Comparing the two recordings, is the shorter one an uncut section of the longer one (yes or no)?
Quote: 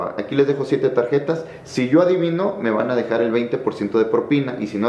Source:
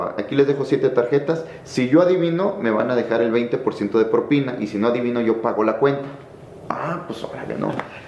yes